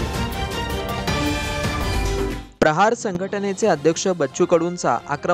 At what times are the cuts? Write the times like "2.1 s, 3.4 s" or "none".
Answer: 2.3 s